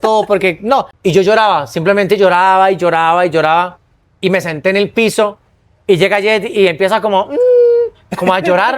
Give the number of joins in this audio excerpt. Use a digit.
1